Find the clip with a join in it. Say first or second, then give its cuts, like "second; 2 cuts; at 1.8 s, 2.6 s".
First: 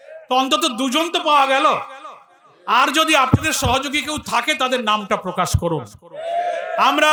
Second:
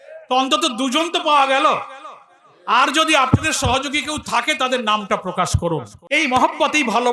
second; 1 cut; at 5.9 s